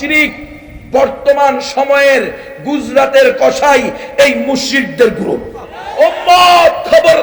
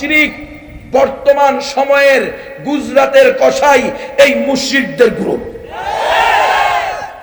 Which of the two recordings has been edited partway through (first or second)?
first